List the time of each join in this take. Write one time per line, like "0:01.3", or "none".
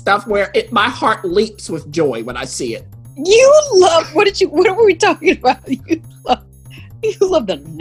none